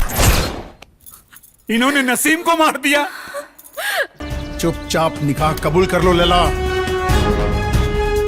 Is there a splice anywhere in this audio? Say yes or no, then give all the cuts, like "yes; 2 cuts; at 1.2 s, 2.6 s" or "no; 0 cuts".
yes; 1 cut; at 4.2 s